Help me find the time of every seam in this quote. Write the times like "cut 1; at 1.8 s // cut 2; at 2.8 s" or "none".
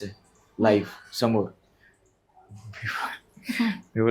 none